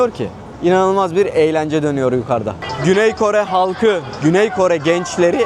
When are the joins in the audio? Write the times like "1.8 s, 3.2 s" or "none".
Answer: 2.7 s